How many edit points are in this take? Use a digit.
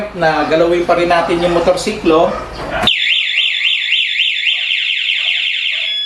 0